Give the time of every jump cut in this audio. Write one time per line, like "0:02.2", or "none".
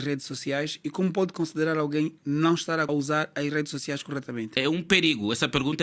0:02.9
0:04.5